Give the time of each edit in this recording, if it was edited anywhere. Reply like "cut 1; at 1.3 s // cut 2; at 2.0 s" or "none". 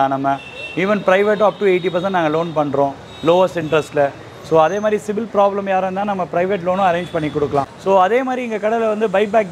cut 1; at 7.7 s